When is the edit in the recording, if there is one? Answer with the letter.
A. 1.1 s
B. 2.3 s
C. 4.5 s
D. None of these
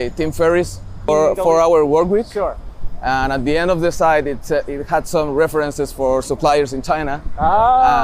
A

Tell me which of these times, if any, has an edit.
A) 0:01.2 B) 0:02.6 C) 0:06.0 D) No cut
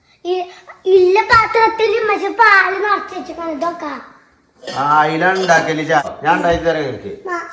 C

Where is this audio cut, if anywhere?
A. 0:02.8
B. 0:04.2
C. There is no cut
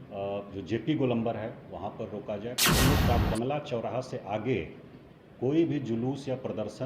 A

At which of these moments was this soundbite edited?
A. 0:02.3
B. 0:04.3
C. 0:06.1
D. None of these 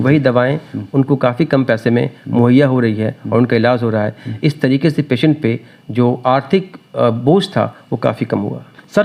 D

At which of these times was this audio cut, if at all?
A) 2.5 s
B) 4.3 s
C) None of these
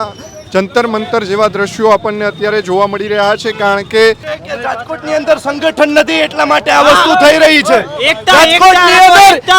B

